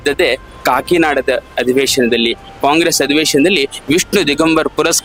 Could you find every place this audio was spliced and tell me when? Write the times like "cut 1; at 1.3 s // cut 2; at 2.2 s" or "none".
none